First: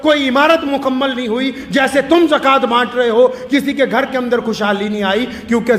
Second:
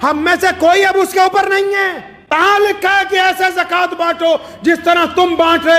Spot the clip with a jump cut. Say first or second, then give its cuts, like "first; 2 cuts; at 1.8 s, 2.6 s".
second; 1 cut; at 2.3 s